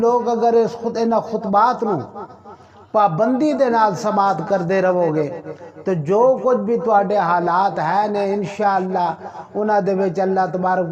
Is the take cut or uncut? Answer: uncut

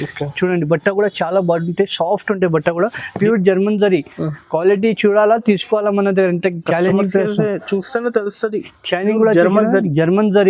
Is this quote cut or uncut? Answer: cut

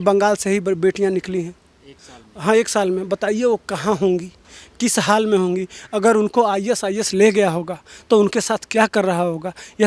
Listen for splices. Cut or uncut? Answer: uncut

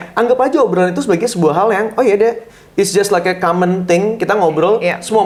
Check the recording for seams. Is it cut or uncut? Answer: uncut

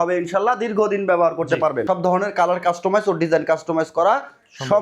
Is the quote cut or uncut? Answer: cut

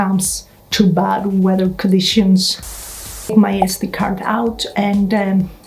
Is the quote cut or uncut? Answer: cut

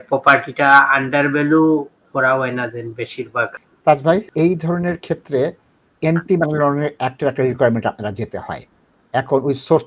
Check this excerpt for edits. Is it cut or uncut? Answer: cut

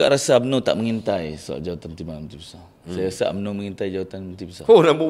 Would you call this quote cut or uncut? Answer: uncut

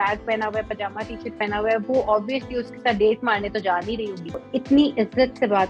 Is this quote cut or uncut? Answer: cut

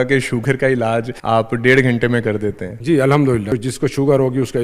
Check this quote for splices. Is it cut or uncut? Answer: cut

